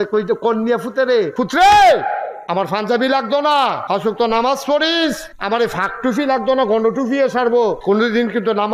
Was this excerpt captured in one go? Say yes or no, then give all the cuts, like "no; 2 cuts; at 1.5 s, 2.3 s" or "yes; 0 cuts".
no; 5 cuts; at 1.3 s, 2.3 s, 3.8 s, 5.3 s, 7.8 s